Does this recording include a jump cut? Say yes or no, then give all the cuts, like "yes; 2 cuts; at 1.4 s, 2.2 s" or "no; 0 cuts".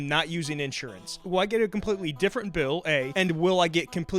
yes; 2 cuts; at 1.2 s, 3.1 s